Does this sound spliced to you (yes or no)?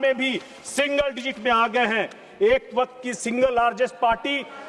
no